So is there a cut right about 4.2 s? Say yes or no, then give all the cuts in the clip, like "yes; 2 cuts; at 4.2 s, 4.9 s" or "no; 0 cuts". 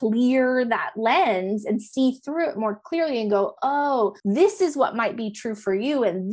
yes; 1 cut; at 4.2 s